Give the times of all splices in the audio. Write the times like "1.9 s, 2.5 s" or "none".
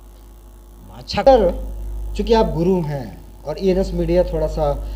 1.2 s